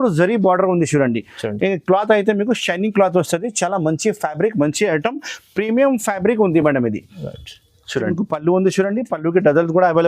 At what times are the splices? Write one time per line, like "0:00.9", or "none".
0:08.1